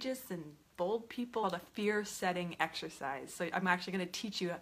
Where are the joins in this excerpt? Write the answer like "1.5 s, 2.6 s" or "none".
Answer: 1.4 s